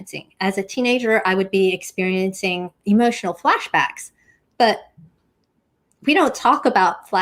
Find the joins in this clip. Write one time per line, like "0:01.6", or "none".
none